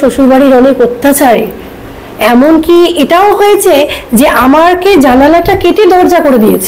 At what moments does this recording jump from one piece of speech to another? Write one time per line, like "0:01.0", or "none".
none